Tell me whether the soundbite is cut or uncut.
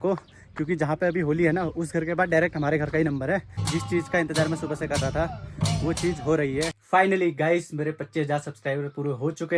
cut